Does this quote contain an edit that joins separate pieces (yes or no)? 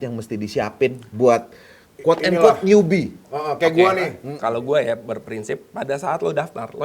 yes